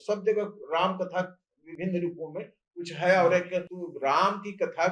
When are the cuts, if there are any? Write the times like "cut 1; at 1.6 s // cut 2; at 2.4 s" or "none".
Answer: cut 1; at 3.8 s